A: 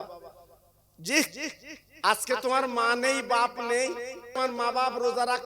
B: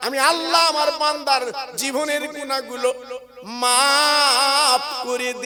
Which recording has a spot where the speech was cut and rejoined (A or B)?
A